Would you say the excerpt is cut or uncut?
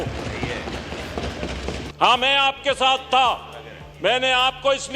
cut